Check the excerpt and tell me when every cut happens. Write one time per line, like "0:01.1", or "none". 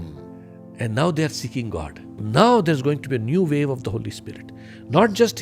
0:02.2